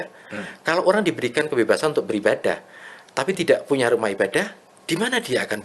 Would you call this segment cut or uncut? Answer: uncut